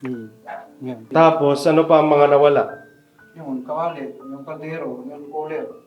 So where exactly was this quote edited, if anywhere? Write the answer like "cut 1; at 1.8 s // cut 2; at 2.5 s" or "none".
cut 1; at 1.1 s